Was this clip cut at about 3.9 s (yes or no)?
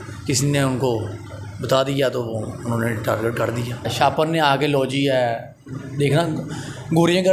yes